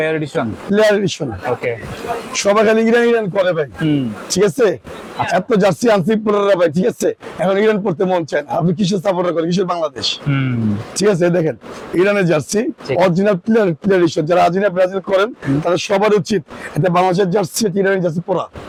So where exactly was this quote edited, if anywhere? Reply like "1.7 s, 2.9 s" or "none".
none